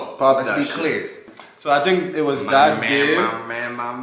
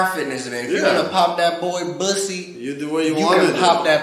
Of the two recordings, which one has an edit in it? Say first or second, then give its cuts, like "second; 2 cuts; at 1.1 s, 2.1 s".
first; 1 cut; at 1.2 s